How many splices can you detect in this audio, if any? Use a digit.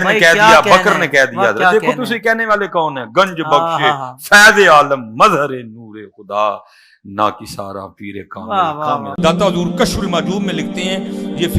1